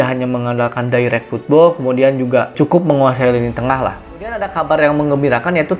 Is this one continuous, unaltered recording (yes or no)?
no